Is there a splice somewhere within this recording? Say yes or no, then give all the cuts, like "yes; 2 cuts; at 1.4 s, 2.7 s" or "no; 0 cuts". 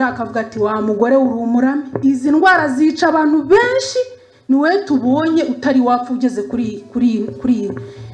no; 0 cuts